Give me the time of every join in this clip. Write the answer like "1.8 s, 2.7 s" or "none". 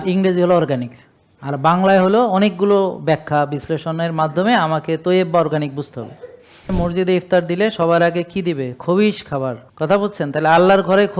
6.7 s, 9.7 s